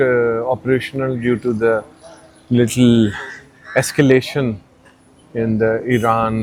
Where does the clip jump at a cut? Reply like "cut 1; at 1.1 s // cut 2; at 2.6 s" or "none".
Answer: none